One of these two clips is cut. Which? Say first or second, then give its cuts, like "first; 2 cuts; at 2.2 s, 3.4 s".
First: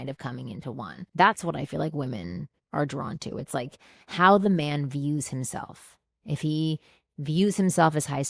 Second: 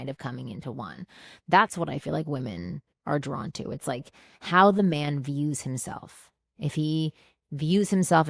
first; 1 cut; at 1.0 s